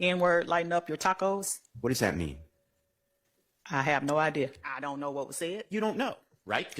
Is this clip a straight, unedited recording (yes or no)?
no